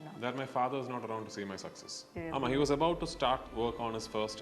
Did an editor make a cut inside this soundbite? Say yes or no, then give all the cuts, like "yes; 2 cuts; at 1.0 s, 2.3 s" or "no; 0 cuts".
yes; 2 cuts; at 2.1 s, 3.5 s